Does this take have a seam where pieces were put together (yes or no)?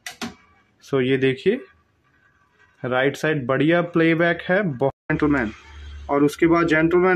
yes